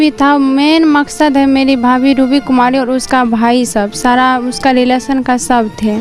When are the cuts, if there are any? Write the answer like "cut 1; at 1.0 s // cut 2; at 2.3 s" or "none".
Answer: none